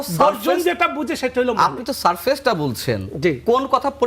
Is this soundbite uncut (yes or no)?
yes